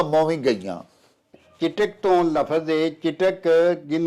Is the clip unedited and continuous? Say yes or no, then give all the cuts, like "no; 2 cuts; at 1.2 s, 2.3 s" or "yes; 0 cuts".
yes; 0 cuts